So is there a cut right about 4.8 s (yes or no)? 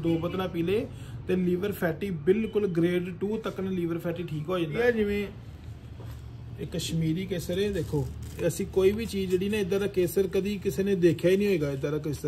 yes